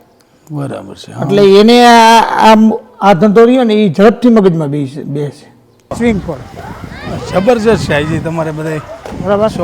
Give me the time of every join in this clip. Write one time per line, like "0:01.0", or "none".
0:05.9